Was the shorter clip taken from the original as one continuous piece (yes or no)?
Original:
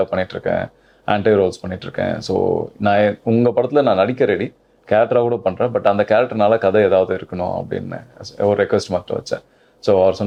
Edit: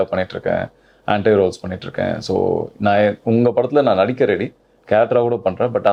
yes